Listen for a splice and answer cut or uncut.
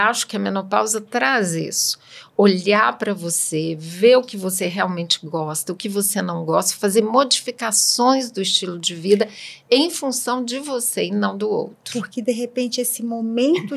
uncut